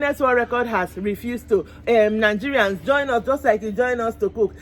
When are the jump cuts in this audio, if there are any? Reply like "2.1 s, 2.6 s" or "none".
none

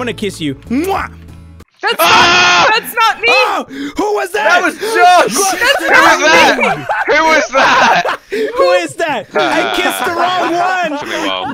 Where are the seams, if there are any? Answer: none

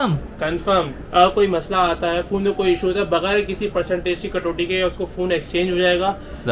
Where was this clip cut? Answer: 1.0 s

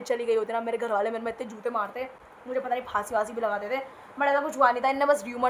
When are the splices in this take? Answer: none

